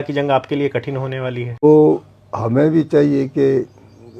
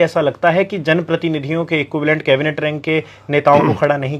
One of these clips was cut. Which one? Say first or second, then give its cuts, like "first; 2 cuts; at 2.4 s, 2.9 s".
first; 1 cut; at 1.6 s